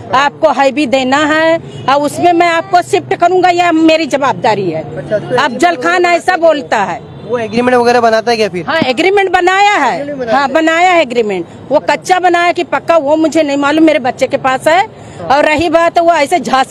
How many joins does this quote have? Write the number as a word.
zero